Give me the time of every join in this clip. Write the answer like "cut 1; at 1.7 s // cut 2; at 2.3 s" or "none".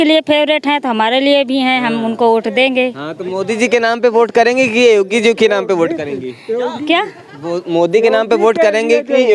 none